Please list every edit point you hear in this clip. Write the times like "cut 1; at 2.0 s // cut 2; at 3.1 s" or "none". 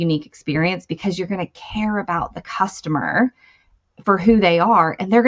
none